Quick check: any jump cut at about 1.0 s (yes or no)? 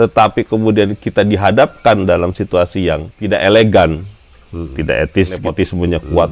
no